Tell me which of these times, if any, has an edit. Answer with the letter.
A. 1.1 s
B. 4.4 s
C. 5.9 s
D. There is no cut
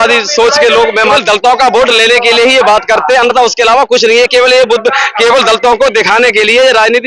A